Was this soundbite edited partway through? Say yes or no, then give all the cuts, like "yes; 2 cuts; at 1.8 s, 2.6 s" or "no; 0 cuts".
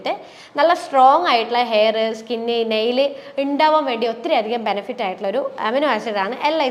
no; 0 cuts